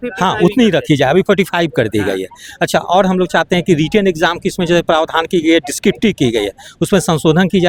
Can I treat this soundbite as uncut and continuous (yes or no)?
yes